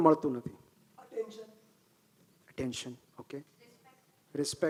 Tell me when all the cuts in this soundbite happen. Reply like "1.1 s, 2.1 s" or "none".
none